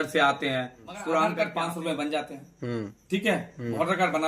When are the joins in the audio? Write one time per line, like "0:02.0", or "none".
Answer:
0:01.4